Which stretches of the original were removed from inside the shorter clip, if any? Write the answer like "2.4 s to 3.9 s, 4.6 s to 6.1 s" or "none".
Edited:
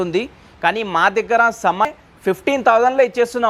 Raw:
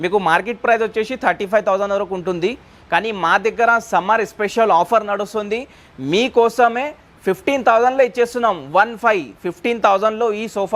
4.2 s to 6.9 s